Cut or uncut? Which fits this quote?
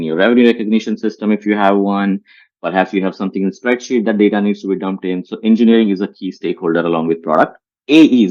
uncut